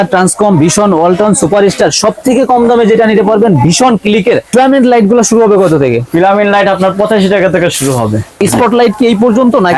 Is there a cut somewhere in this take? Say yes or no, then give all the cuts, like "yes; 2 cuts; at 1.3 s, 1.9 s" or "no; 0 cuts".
yes; 2 cuts; at 3.8 s, 8.4 s